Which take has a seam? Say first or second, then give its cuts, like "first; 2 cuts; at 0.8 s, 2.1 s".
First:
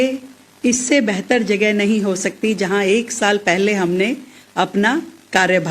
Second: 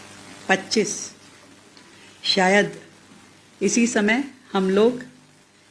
first; 1 cut; at 4.7 s